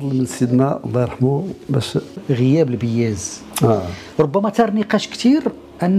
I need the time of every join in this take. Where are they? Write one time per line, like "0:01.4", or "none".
0:02.2